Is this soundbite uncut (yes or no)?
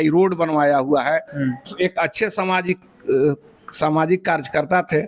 yes